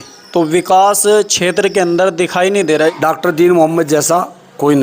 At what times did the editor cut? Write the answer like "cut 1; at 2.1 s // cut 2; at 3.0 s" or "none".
cut 1; at 3.0 s